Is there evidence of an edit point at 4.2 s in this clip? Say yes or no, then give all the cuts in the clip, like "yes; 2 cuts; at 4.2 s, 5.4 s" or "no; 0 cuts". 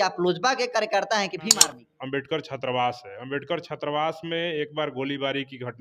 no; 1 cut; at 1.6 s